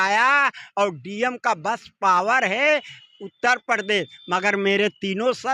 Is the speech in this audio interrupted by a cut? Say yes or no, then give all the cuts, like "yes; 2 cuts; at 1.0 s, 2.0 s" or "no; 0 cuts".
no; 0 cuts